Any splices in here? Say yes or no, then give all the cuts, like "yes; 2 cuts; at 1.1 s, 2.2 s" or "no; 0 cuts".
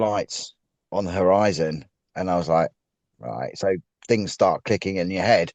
no; 0 cuts